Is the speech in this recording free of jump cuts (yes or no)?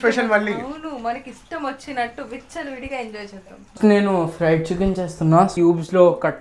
no